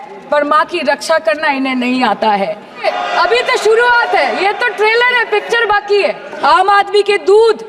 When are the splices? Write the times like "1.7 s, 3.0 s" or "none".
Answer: 2.8 s, 6.4 s